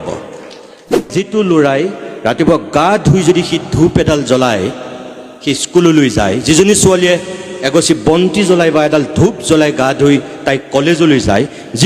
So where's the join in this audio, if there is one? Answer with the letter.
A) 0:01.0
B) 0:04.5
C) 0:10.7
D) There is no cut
A